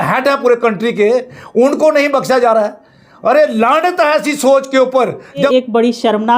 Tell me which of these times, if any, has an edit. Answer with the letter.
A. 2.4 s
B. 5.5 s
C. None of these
B